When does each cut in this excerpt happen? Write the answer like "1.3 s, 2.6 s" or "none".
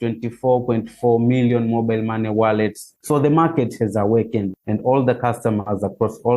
2.9 s, 4.5 s